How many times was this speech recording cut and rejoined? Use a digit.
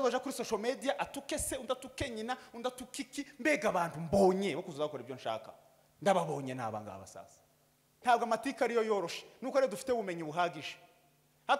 1